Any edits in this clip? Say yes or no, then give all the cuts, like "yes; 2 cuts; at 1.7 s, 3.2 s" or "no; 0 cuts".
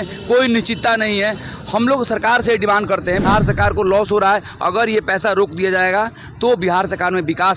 yes; 1 cut; at 3.2 s